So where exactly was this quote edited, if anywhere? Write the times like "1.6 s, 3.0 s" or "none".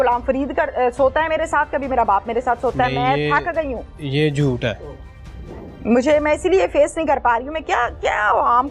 none